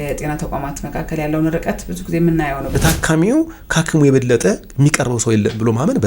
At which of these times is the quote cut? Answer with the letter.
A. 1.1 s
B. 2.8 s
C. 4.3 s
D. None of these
B